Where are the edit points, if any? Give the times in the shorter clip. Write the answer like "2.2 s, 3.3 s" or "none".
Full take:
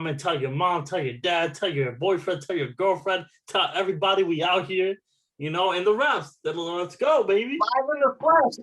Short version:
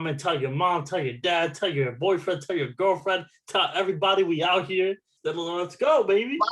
5.2 s